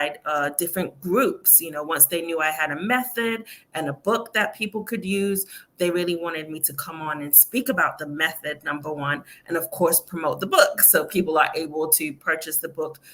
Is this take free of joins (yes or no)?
yes